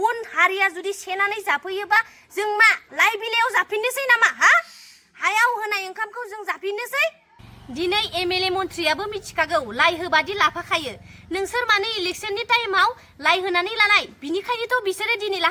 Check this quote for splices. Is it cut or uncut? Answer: uncut